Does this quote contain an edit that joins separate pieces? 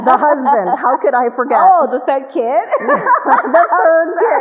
no; 0 cuts

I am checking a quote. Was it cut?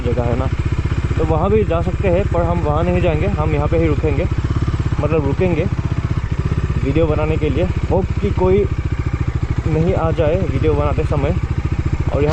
no; 0 cuts

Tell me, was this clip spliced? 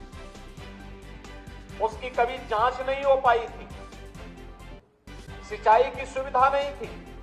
no; 0 cuts

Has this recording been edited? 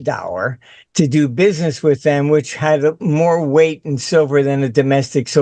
no; 0 cuts

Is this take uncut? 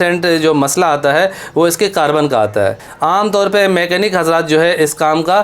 no; 1 cut; at 2.9 s

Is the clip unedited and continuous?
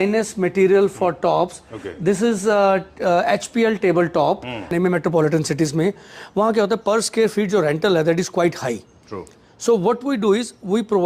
no; 1 cut; at 4.7 s

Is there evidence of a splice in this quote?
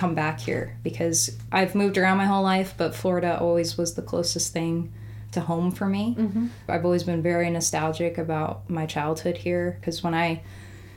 no; 0 cuts

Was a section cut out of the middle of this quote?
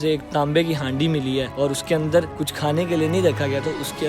yes; 2 cuts; at 1.5 s, 2.4 s

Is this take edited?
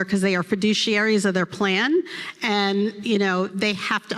no; 0 cuts

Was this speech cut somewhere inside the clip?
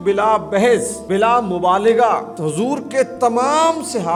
no; 0 cuts

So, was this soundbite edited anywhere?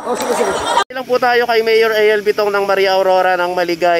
no; 0 cuts

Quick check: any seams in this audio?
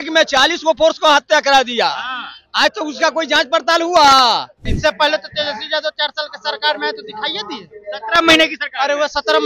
yes; 1 cut; at 4.7 s

